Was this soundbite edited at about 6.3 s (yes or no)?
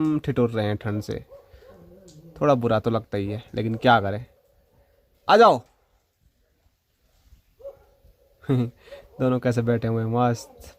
no